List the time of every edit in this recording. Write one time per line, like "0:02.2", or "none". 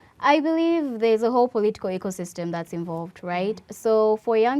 none

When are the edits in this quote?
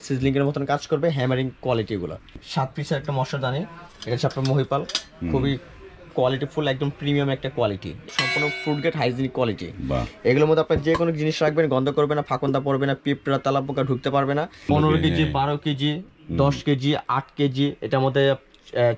0:02.2
0:08.1
0:14.7

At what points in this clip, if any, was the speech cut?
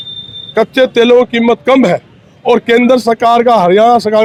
none

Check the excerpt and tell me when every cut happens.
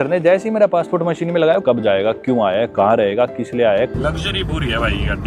0:01.6
0:03.9

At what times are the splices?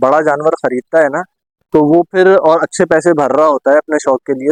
none

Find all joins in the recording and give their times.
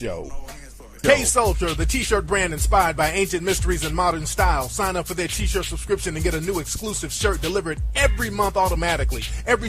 0:05.8

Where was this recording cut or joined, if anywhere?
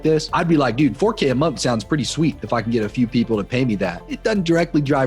0:04.0

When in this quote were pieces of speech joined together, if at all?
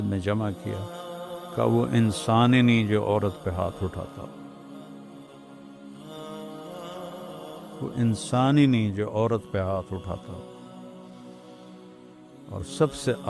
0:04.6
0:07.4
0:10.4
0:12.1

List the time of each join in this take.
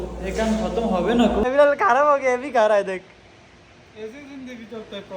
0:01.4

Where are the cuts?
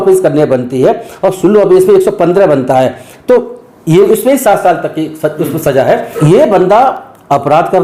0:06.2

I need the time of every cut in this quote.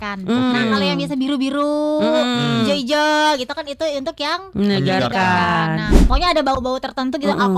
0:06.0

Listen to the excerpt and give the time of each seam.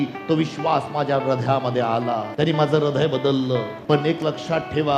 0:02.3
0:03.7

